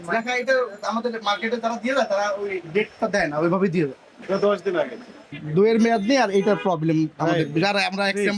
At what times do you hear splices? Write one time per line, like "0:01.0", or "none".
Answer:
0:04.2
0:05.4